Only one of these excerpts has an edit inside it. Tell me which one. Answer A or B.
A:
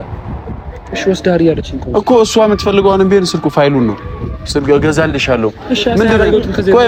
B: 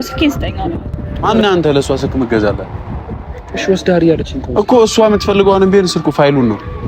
B